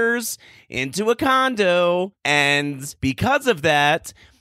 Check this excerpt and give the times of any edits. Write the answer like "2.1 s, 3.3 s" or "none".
2.2 s